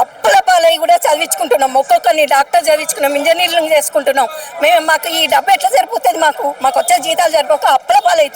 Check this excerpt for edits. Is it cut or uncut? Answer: uncut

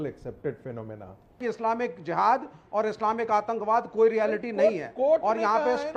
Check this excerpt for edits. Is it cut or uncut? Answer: cut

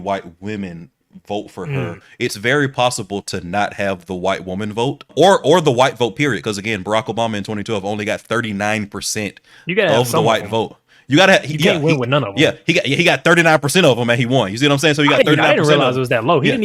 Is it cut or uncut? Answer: cut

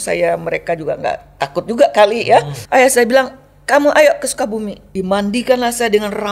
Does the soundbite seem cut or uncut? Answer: cut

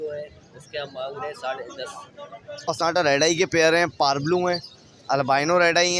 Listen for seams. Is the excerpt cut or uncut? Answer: cut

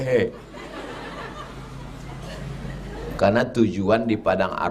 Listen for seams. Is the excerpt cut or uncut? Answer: cut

